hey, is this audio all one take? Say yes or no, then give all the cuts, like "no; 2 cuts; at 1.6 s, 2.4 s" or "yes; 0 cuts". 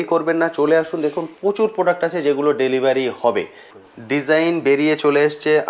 no; 1 cut; at 3.9 s